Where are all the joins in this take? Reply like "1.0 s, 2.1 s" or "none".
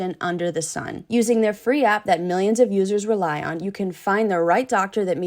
1.0 s